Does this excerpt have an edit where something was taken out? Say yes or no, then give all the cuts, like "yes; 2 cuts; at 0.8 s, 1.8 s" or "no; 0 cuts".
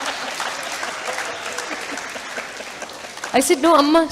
no; 0 cuts